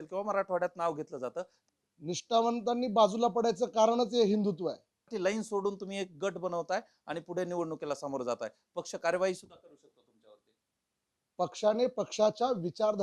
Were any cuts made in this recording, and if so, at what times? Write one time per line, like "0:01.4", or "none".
0:01.6
0:05.1